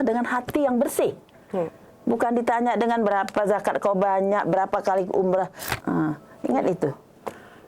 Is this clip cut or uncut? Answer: cut